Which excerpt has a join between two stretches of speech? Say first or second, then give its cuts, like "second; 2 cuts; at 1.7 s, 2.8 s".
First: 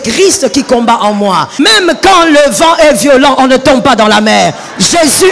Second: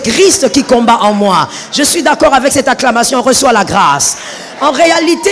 first; 1 cut; at 1.5 s